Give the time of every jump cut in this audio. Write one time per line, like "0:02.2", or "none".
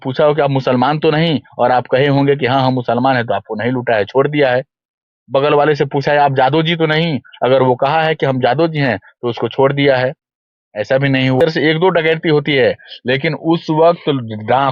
0:11.4

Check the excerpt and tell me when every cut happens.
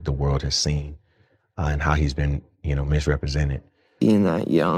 0:03.8

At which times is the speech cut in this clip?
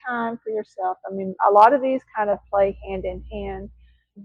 none

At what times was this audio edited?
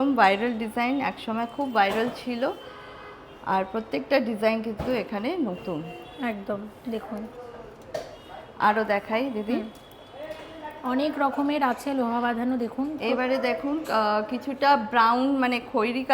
none

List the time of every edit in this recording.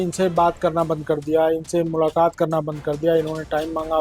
none

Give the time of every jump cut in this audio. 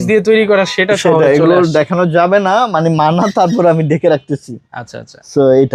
none

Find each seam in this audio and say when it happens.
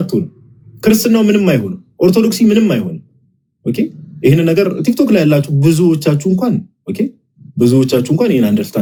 none

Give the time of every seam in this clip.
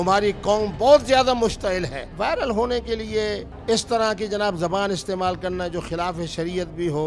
0:02.0
0:03.5

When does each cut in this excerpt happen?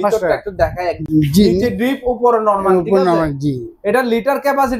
0:01.0

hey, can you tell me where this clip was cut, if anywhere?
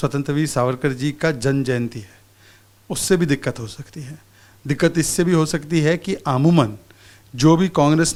none

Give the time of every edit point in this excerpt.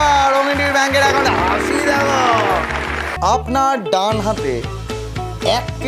0:03.0

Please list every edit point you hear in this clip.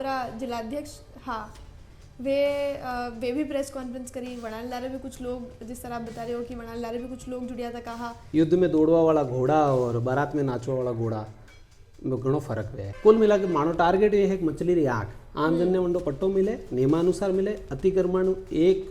0:08.2
0:12.8

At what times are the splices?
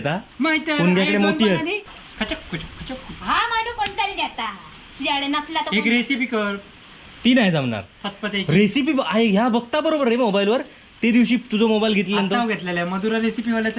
0:01.9

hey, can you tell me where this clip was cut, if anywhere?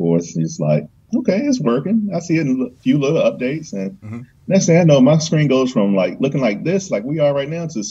none

